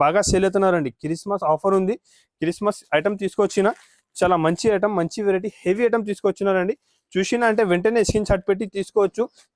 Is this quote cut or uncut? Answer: uncut